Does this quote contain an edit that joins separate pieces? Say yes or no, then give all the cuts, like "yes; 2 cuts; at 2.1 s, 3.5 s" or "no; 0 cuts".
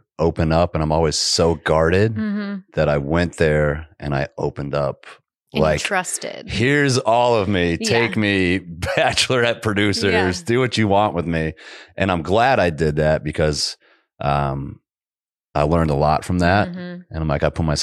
no; 0 cuts